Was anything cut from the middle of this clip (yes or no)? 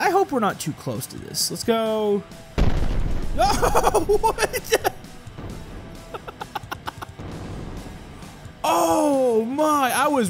no